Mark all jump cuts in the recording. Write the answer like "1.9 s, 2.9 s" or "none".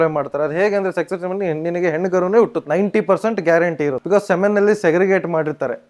2.6 s, 4.0 s